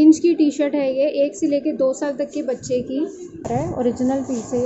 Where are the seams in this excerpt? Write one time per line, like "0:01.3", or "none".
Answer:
0:03.5